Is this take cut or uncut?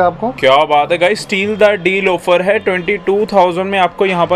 uncut